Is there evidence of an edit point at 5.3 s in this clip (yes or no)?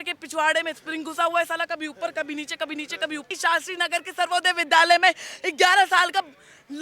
no